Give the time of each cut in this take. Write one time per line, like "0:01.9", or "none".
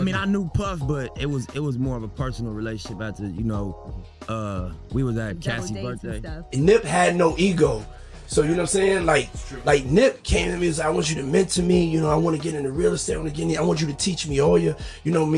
0:06.4